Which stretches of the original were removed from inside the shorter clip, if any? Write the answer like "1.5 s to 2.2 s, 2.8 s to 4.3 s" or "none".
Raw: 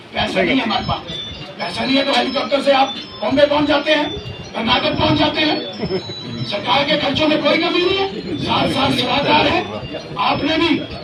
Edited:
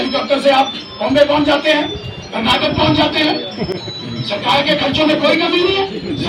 none